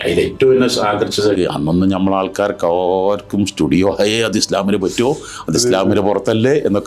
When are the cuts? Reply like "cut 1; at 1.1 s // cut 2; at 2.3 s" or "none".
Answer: cut 1; at 1.4 s